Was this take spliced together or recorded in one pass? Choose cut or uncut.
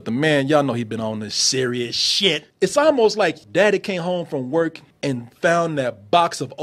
cut